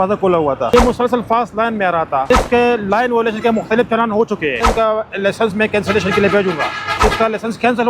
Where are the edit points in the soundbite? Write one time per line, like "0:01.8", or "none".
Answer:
0:00.7
0:02.3
0:04.6
0:07.0